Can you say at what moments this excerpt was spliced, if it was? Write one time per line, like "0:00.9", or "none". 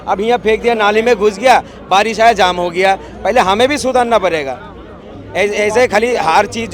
none

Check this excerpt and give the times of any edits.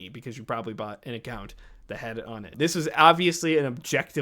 0:02.5

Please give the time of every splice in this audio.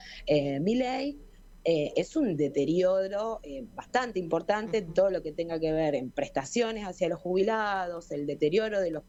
none

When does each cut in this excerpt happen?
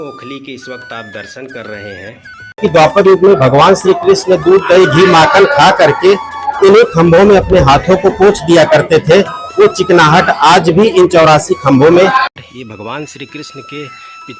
0:02.6
0:12.3

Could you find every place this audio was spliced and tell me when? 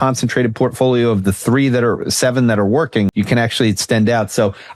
0:03.1

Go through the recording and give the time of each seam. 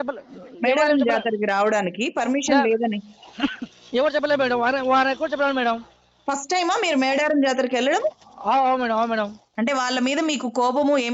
0:09.4

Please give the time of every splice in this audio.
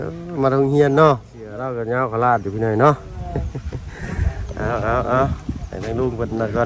0:01.7

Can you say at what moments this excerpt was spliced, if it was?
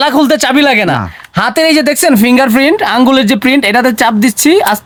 none

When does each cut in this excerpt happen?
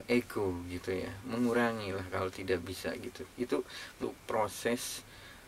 0:03.9

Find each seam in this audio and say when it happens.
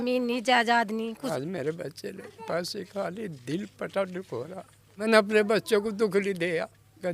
0:01.3
0:05.0

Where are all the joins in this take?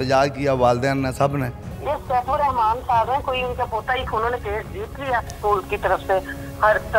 0:01.6
0:04.1
0:05.4

